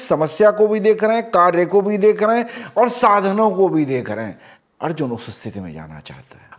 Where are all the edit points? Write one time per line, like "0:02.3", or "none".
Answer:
none